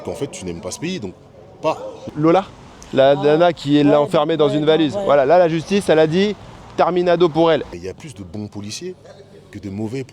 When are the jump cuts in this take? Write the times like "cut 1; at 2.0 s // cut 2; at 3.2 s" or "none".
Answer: cut 1; at 2.0 s // cut 2; at 7.7 s